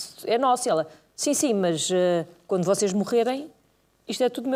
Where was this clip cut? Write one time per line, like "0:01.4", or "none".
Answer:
none